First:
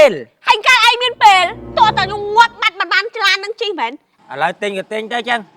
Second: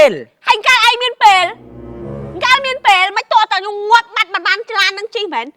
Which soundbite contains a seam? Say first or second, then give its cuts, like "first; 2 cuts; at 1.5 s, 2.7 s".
first; 2 cuts; at 1.7 s, 4.1 s